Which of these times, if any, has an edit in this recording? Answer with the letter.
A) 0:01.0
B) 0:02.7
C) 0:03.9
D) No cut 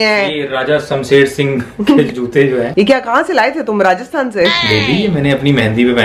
D